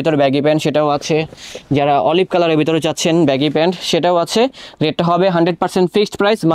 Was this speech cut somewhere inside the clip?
no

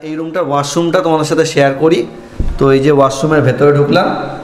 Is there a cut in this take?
no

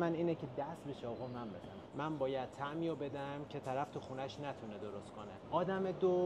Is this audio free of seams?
no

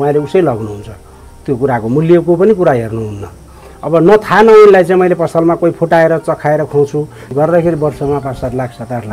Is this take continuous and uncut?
no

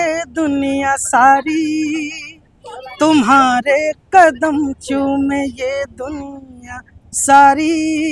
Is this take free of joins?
yes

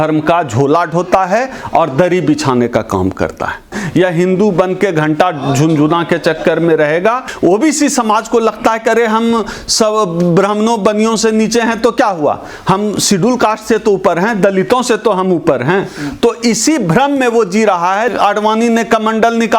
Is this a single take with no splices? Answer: no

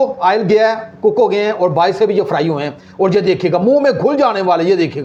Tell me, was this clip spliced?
no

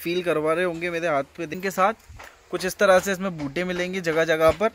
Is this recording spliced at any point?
yes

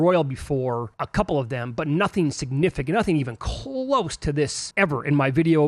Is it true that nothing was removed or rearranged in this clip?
no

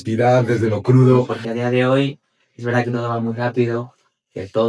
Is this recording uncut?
no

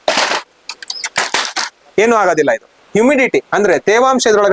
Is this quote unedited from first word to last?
no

